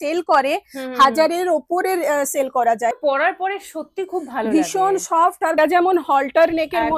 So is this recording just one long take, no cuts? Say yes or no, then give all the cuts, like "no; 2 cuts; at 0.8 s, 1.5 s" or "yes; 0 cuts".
no; 2 cuts; at 2.9 s, 5.6 s